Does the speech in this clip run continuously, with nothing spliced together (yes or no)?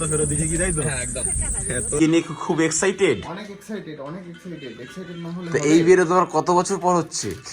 no